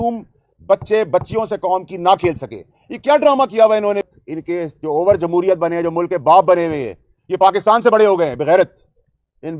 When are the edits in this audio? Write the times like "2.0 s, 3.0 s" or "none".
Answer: 4.0 s